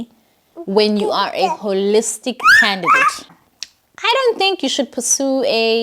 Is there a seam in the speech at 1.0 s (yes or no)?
no